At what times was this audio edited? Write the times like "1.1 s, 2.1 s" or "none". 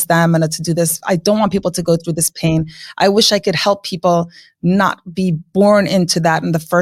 none